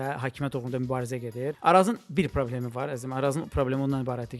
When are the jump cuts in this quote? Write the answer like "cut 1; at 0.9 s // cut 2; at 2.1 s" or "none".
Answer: cut 1; at 1.6 s